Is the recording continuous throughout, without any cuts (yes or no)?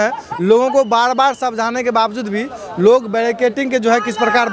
yes